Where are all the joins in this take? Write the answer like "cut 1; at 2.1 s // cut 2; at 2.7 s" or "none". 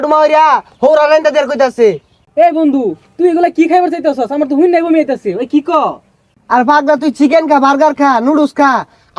none